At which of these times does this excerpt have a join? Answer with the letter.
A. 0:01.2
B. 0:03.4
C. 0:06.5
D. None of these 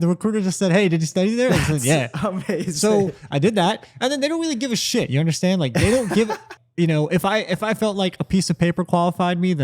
C